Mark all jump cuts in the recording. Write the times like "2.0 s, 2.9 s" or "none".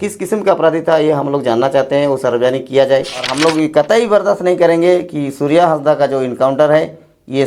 3.3 s